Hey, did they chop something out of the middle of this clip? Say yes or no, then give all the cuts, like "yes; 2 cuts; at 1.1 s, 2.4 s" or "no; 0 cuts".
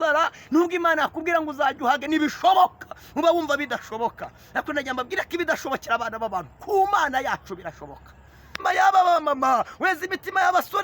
yes; 1 cut; at 8.6 s